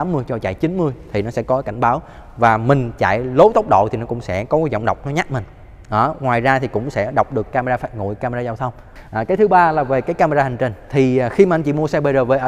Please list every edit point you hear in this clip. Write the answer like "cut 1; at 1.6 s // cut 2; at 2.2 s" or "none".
cut 1; at 8.9 s